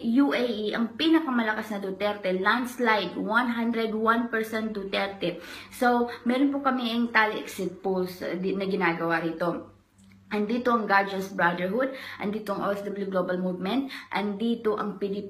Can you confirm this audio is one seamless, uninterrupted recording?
yes; 0 cuts

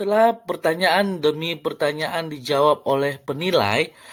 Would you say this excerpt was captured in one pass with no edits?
yes; 0 cuts

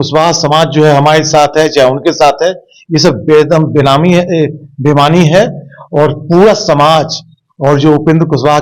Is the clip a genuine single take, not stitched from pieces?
yes; 0 cuts

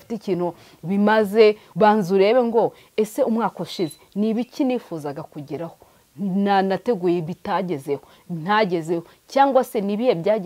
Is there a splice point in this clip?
yes; 1 cut; at 1.7 s

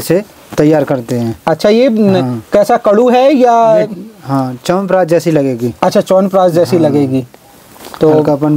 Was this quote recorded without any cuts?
yes; 0 cuts

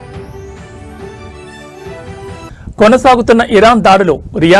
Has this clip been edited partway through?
no; 0 cuts

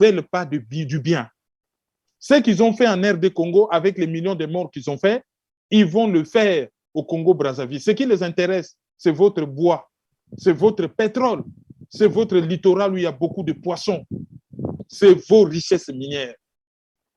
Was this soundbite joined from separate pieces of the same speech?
yes; 1 cut; at 14.8 s

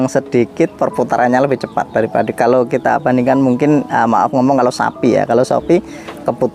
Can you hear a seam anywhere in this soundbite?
no; 0 cuts

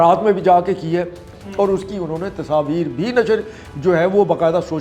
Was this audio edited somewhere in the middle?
yes; 1 cut; at 1.2 s

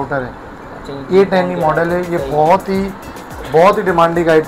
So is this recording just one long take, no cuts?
yes; 0 cuts

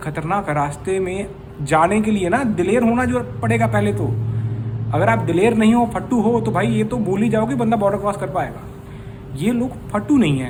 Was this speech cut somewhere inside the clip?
no; 0 cuts

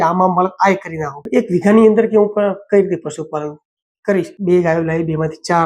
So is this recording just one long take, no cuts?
no; 2 cuts; at 1.2 s, 4.3 s

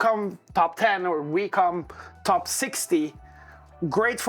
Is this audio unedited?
yes; 0 cuts

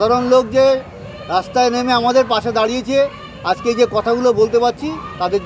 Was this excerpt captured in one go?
yes; 0 cuts

